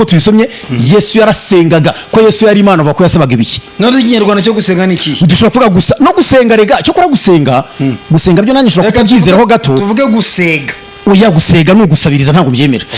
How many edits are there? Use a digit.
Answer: 0